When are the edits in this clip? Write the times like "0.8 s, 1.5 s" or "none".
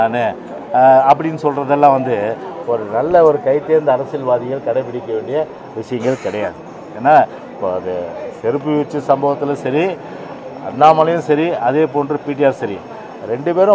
none